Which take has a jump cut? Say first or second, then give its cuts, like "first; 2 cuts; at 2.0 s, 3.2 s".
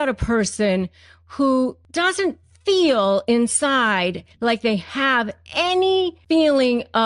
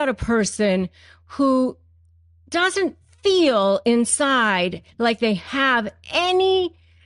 first; 2 cuts; at 1.8 s, 6.2 s